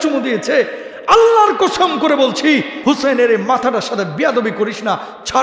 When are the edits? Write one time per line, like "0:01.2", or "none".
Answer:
0:02.7